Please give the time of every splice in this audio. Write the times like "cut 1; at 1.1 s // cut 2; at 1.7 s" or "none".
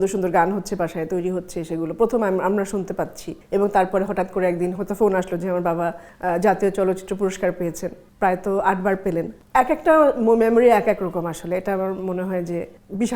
none